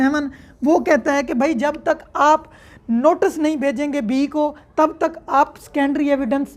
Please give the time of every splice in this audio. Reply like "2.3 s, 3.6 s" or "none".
none